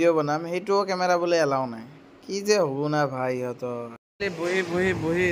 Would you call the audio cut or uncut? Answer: uncut